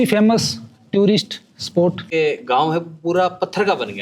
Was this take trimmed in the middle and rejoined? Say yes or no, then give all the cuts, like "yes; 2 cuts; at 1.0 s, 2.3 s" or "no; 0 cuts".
yes; 1 cut; at 2.0 s